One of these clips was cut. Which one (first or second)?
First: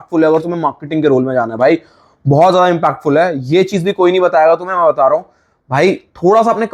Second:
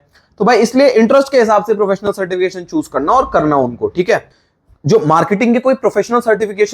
second